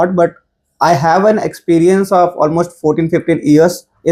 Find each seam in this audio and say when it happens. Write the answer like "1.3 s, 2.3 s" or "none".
none